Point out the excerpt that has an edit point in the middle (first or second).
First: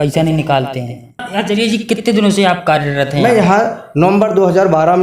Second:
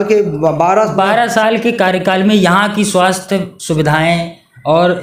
first